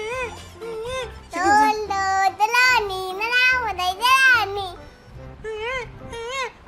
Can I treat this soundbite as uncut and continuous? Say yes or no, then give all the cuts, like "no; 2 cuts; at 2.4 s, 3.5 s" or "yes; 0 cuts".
yes; 0 cuts